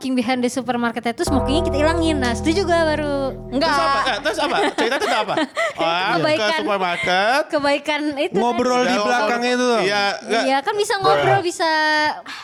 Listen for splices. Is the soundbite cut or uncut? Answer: uncut